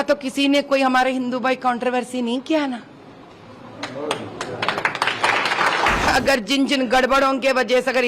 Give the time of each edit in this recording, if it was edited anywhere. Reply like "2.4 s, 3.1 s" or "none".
6.1 s